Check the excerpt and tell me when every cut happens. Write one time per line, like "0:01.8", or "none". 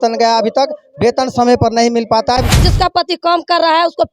0:02.7